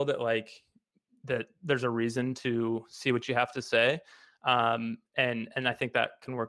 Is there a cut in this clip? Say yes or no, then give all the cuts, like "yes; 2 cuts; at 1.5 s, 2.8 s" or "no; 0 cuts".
no; 0 cuts